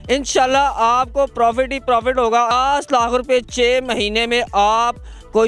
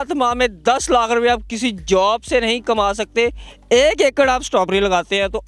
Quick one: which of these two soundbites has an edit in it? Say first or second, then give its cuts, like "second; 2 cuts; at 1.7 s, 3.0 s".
first; 1 cut; at 2.5 s